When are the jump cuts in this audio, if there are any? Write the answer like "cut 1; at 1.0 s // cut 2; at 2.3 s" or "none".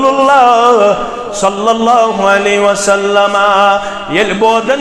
none